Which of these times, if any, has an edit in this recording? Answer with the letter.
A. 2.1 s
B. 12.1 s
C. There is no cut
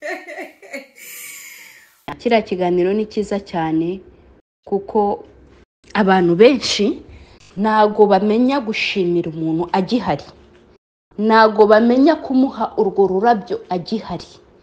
A